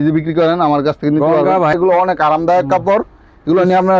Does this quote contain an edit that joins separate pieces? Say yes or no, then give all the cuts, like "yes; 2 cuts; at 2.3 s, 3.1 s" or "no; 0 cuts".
yes; 1 cut; at 1.7 s